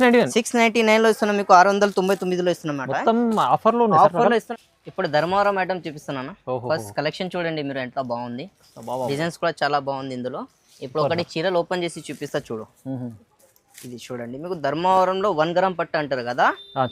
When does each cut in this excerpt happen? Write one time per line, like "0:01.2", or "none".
0:04.5